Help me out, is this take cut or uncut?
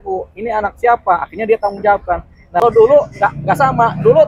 cut